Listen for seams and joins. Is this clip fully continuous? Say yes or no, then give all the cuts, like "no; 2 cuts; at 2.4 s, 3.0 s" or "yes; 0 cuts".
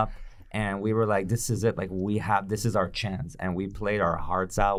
yes; 0 cuts